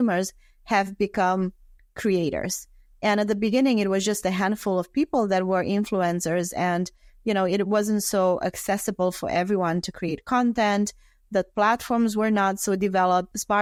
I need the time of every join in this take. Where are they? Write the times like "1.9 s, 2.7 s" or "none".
none